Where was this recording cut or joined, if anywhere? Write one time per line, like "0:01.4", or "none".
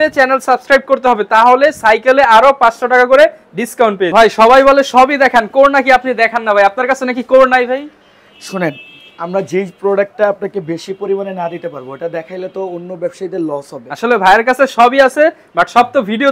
none